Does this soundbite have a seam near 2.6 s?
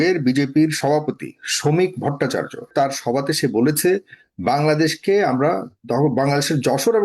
yes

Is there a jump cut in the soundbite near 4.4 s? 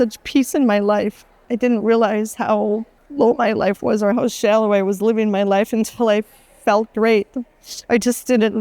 no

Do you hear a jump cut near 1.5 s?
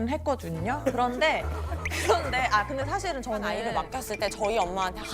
no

